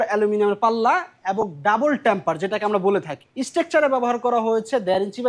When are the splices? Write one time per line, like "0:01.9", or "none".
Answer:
0:03.2